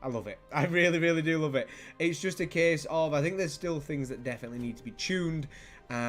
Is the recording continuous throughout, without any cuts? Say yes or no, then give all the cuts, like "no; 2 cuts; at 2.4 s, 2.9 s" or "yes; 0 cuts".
yes; 0 cuts